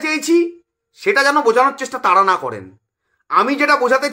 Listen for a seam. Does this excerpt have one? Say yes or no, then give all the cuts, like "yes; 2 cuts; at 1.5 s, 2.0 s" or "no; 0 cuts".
no; 0 cuts